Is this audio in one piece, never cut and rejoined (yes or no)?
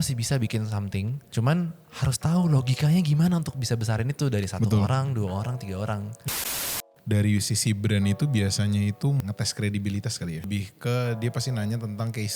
no